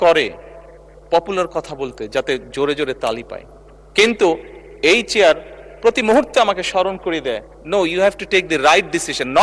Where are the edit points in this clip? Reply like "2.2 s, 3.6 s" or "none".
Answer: none